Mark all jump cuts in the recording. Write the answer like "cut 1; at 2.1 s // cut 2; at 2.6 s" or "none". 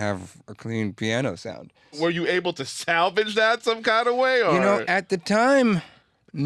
cut 1; at 2.0 s